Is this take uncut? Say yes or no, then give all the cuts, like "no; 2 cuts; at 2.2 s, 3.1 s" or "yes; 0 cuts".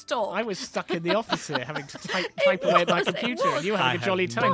yes; 0 cuts